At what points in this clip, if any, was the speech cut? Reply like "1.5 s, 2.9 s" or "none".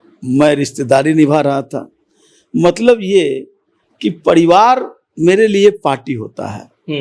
none